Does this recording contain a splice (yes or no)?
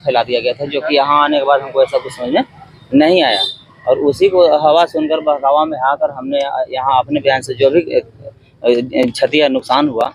no